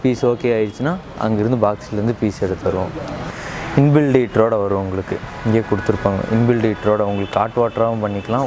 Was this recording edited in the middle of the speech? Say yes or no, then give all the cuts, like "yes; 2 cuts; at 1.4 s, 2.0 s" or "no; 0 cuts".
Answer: yes; 1 cut; at 3.3 s